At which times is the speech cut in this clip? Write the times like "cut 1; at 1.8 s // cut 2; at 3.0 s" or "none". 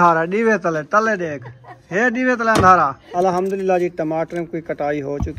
cut 1; at 3.0 s